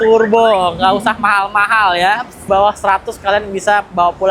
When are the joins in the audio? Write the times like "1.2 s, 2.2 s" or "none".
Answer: 2.4 s

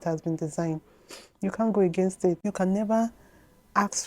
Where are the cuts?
2.4 s

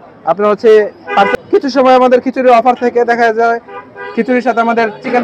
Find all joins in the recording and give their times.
1.4 s

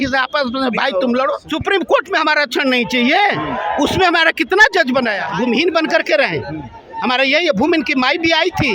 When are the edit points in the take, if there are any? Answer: 1.4 s, 5.2 s

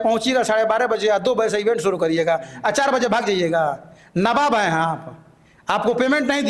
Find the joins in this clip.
none

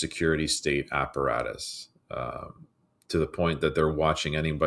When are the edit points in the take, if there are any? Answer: none

